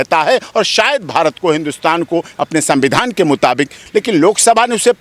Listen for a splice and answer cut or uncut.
cut